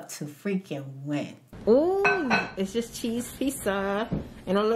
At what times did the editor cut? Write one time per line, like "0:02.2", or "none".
0:01.4